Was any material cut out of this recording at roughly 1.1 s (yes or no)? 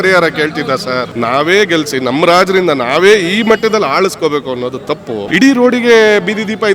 yes